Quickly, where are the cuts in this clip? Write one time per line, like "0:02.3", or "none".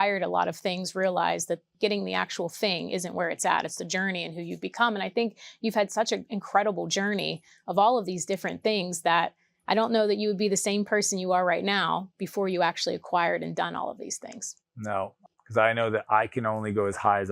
0:01.7
0:15.2